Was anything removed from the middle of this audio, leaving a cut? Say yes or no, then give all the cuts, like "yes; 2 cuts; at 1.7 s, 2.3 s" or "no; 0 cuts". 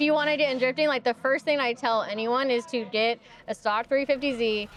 no; 0 cuts